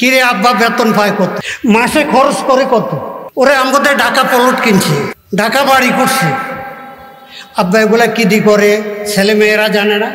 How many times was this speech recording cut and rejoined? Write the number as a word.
three